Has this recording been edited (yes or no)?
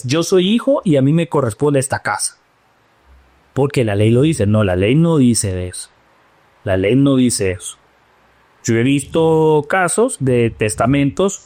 no